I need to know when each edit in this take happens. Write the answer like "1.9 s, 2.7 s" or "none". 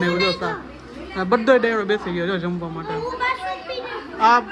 none